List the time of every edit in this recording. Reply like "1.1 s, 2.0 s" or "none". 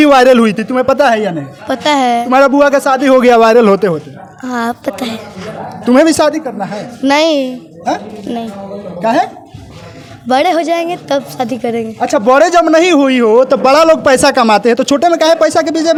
none